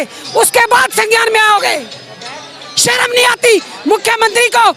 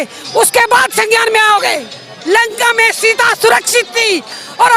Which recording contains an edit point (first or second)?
second